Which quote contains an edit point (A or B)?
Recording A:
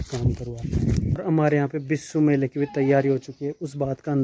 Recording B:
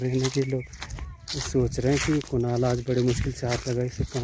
A